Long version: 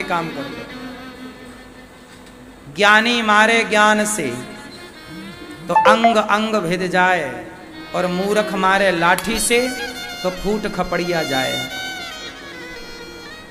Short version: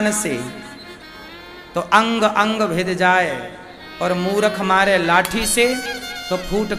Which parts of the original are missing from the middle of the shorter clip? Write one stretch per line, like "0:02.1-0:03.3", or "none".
none